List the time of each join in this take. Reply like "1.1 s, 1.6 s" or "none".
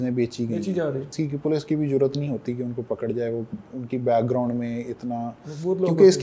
1.1 s